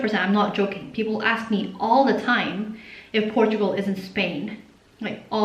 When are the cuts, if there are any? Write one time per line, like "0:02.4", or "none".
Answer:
none